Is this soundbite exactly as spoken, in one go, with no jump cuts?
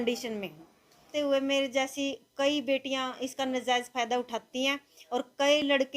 no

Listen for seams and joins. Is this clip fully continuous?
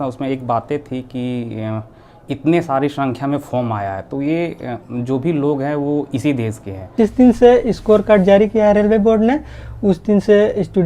no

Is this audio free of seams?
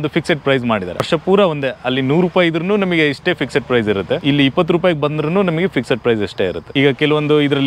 no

